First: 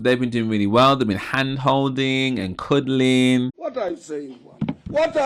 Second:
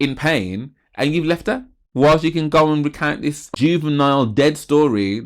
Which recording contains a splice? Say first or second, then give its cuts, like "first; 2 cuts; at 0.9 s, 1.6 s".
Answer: second; 2 cuts; at 1.8 s, 3.5 s